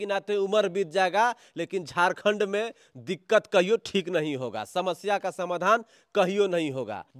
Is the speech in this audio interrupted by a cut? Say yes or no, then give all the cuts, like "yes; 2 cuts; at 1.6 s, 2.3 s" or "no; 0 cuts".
no; 0 cuts